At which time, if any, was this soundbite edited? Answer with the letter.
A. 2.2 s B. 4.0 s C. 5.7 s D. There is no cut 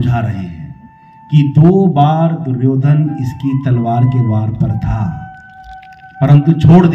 D